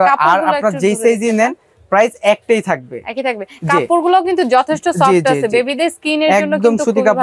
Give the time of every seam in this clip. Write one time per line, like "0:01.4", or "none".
none